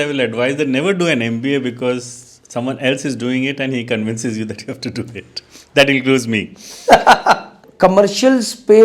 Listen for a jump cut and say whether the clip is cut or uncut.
cut